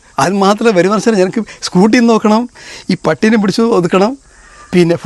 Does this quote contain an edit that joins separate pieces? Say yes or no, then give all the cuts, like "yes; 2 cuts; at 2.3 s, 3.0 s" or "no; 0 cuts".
no; 0 cuts